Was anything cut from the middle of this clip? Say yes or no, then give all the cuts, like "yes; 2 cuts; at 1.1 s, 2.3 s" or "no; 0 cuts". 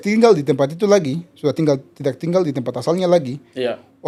no; 0 cuts